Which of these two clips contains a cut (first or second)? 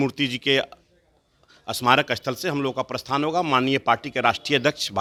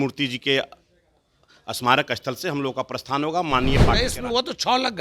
second